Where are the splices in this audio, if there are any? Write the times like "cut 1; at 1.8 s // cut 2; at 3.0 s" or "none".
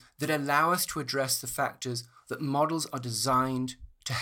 none